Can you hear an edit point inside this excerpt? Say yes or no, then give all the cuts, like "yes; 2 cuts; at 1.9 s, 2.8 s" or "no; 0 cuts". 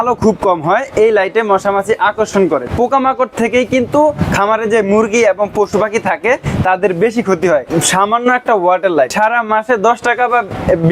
yes; 3 cuts; at 2.7 s, 7.7 s, 9.1 s